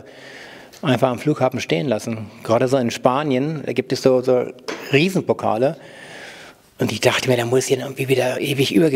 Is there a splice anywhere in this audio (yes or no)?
no